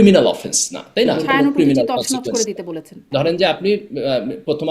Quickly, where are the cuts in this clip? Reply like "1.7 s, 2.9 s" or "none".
1.2 s, 3.0 s